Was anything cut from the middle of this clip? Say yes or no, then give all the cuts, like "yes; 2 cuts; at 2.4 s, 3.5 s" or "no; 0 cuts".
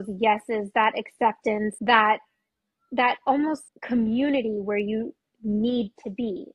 yes; 2 cuts; at 1.8 s, 3.7 s